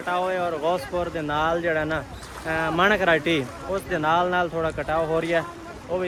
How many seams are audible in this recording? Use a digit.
0